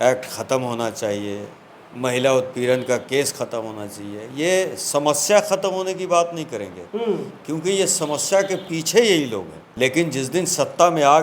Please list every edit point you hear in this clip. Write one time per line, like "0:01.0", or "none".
0:09.6